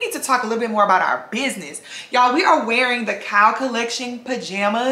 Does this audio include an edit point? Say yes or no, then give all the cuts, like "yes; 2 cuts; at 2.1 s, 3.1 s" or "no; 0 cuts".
no; 0 cuts